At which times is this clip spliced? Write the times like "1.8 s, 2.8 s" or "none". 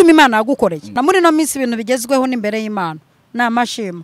1.0 s